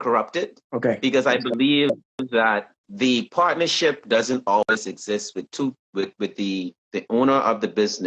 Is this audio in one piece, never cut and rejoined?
no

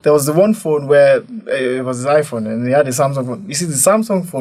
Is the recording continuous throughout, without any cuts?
yes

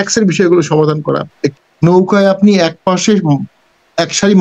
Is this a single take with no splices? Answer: no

